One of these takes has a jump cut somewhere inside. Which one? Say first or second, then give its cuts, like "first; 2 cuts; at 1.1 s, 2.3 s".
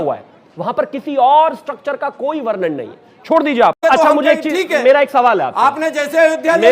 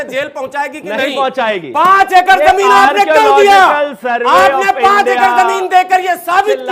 first; 1 cut; at 3.8 s